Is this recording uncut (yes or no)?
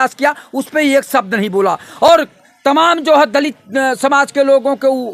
yes